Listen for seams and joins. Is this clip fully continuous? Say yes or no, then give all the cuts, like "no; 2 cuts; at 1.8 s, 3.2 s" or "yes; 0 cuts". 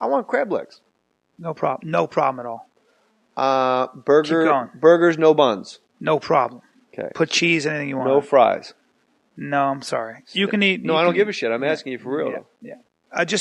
yes; 0 cuts